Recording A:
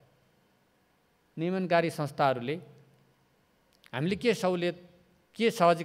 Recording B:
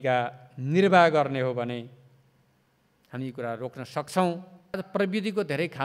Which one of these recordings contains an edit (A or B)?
B